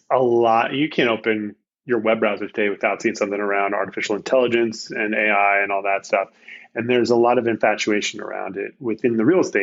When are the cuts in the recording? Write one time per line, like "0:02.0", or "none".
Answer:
none